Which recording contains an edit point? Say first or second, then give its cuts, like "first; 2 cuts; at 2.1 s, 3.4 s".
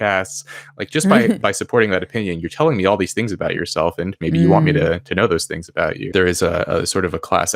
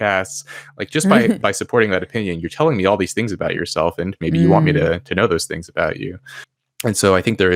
first; 1 cut; at 6.1 s